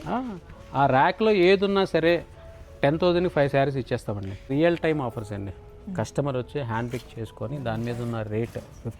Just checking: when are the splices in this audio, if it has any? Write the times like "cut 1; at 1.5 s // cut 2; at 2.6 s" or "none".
cut 1; at 4.5 s